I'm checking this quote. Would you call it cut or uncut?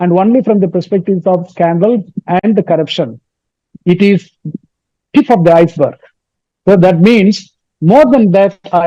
uncut